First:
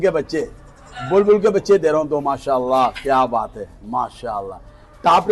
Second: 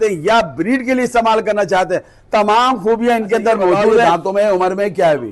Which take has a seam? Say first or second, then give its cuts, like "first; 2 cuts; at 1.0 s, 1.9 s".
second; 1 cut; at 4.1 s